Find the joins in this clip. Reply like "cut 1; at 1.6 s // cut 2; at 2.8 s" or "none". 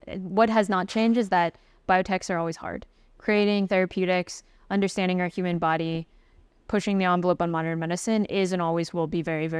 none